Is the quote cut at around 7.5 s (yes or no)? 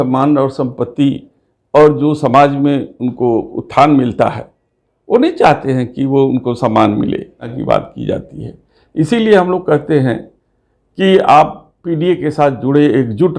yes